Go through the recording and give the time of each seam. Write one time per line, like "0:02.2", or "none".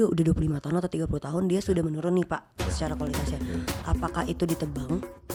none